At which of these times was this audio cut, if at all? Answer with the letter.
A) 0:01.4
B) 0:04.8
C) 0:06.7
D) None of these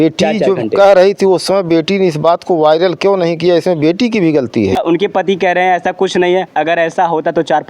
B